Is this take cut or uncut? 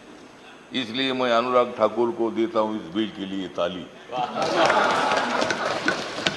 cut